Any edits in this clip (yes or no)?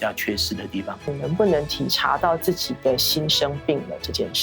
yes